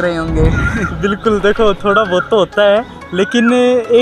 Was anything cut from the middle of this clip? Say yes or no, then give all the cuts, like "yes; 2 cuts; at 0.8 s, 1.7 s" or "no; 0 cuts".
no; 0 cuts